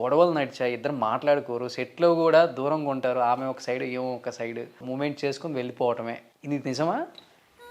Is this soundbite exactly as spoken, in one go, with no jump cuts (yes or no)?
no